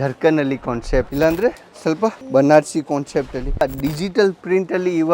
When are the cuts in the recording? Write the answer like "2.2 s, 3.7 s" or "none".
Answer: 1.1 s, 2.2 s, 3.6 s